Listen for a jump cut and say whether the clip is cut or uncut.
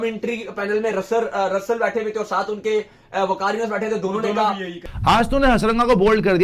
cut